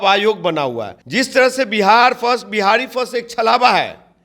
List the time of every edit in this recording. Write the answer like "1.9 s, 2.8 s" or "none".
0.9 s